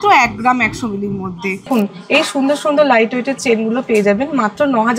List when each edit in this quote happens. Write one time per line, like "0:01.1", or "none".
0:01.7